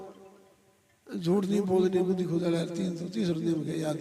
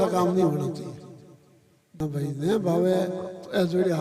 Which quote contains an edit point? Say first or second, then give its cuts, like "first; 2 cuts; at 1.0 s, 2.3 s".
second; 1 cut; at 1.9 s